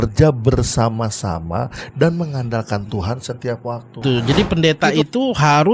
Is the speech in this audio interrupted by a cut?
yes; 1 cut; at 4.0 s

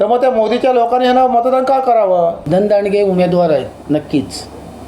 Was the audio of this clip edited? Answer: yes; 1 cut; at 2.4 s

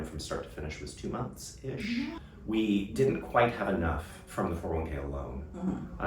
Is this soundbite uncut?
no; 1 cut; at 2.2 s

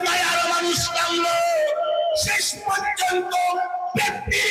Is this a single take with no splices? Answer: yes; 0 cuts

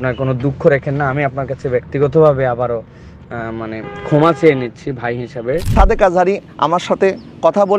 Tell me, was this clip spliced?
yes; 1 cut; at 5.7 s

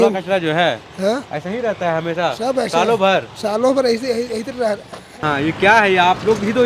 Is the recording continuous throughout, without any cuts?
no; 1 cut; at 5.2 s

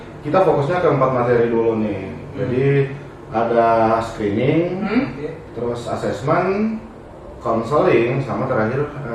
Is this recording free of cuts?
yes; 0 cuts

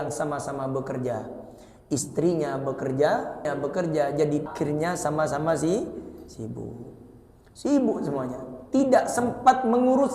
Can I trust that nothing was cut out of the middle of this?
no; 2 cuts; at 3.4 s, 4.5 s

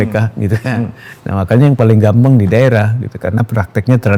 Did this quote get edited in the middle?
no; 0 cuts

